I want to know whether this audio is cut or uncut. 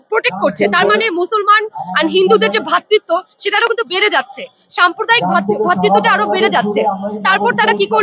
uncut